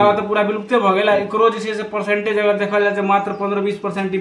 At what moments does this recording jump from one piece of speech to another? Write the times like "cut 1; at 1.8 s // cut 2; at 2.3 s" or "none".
none